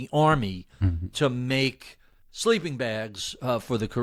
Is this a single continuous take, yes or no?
yes